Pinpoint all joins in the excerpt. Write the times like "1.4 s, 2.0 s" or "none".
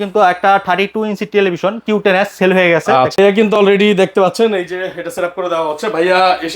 3.2 s